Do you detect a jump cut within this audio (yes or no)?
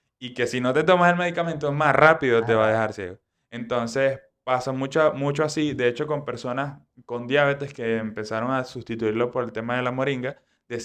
no